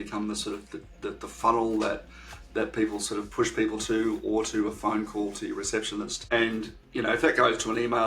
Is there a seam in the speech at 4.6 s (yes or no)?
no